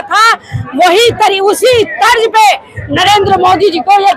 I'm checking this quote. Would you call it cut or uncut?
uncut